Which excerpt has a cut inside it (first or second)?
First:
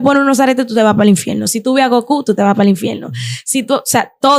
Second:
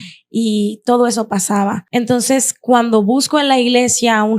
second